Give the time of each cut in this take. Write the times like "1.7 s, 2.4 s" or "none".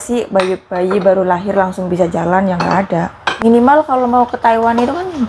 3.2 s